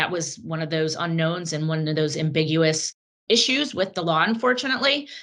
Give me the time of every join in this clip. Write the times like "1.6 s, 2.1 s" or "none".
none